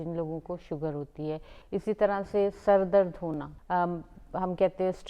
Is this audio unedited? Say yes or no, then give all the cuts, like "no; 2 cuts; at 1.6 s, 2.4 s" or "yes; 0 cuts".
no; 2 cuts; at 1.5 s, 3.5 s